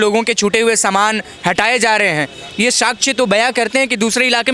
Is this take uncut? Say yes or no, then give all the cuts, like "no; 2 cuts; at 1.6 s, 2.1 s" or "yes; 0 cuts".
yes; 0 cuts